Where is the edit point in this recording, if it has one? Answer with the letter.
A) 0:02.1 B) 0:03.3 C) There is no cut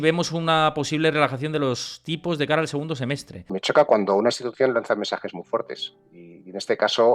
B